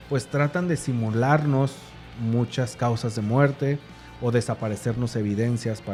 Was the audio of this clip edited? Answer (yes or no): no